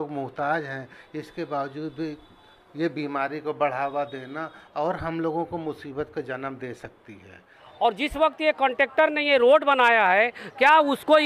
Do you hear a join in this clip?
yes; 1 cut; at 7.6 s

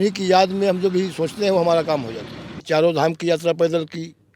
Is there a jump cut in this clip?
yes; 1 cut; at 2.6 s

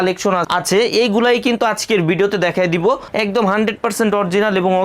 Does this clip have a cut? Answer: yes; 1 cut; at 3.0 s

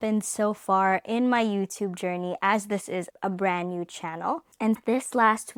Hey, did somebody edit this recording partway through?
no; 0 cuts

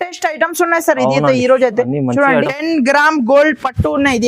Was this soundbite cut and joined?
yes; 1 cut; at 2.5 s

